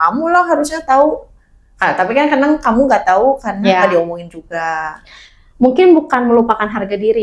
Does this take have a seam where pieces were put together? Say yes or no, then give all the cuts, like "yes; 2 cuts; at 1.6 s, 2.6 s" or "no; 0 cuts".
no; 0 cuts